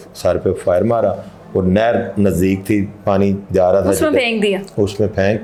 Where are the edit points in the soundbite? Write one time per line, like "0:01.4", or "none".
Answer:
none